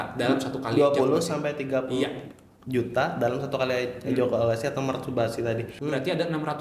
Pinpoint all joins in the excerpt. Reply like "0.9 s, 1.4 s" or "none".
5.7 s